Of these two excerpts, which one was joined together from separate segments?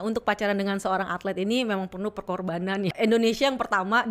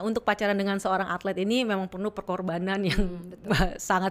first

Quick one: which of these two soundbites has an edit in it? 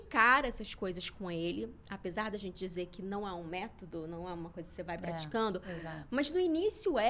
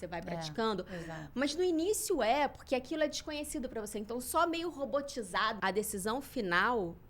second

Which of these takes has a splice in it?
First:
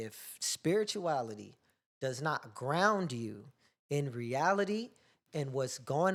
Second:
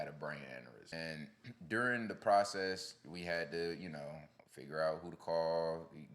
second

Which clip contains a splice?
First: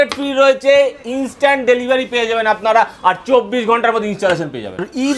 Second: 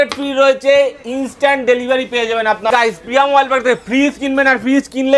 second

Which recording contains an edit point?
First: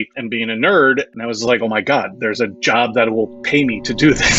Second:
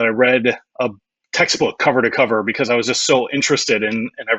first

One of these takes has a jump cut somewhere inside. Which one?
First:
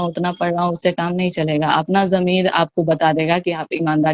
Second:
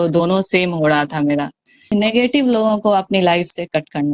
second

